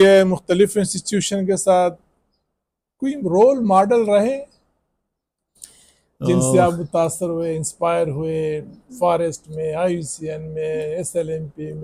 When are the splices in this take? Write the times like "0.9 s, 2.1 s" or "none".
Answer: none